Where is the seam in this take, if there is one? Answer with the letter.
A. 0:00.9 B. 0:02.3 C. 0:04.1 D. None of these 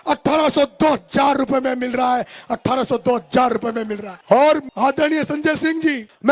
D